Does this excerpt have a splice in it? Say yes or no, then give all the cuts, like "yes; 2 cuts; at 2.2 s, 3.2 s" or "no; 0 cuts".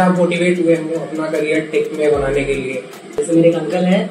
yes; 1 cut; at 3.2 s